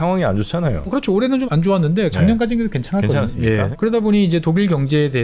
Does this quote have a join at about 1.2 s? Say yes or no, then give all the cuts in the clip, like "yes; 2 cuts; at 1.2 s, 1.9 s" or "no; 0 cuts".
yes; 2 cuts; at 1.2 s, 3.7 s